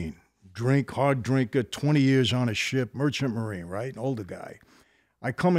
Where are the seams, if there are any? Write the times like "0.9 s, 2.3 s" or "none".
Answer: none